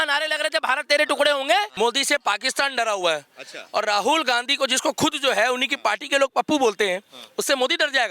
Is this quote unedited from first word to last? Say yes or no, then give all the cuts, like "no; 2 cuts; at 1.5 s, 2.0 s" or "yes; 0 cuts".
no; 1 cut; at 1.7 s